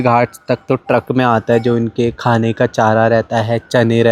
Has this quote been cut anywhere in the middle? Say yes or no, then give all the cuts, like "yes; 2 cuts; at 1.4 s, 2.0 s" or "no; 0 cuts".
no; 0 cuts